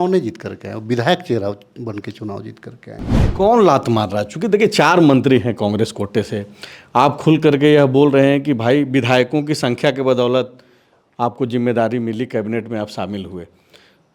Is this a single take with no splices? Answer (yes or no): no